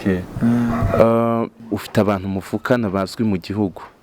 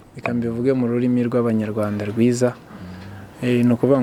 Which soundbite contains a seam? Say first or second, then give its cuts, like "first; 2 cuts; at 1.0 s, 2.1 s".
first; 1 cut; at 1.6 s